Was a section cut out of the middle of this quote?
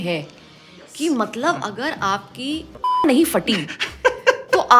yes; 1 cut; at 2.8 s

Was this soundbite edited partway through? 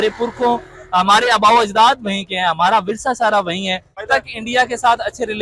yes; 1 cut; at 4.0 s

